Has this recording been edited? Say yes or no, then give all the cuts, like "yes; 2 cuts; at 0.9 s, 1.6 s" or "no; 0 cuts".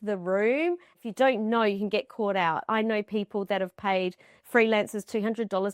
yes; 1 cut; at 1.0 s